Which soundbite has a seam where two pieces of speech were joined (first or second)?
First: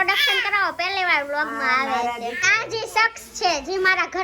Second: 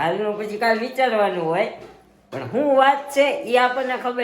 first